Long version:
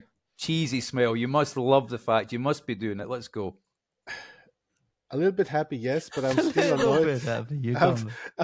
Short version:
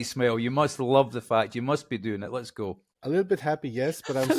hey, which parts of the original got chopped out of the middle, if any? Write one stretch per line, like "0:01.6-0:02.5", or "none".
0:03.7-0:05.0